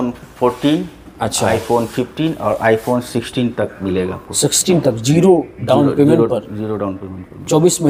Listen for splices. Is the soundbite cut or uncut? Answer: uncut